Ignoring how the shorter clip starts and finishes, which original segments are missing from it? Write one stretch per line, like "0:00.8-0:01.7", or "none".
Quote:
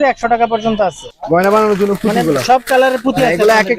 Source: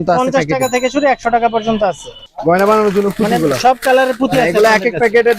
0:02.1-0:02.2